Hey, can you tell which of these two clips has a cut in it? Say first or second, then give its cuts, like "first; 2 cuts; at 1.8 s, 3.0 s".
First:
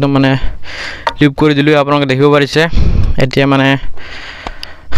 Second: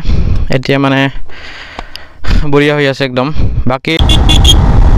second; 1 cut; at 4.0 s